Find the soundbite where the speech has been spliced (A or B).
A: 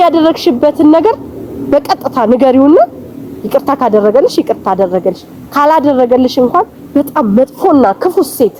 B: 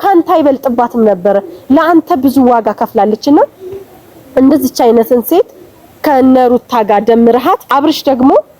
B